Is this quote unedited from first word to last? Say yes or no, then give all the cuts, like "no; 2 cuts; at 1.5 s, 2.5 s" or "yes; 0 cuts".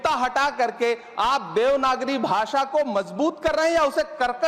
yes; 0 cuts